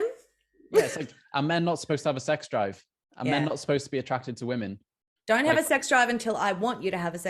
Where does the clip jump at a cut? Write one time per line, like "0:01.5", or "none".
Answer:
none